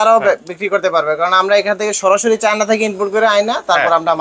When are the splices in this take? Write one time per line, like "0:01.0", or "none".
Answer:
none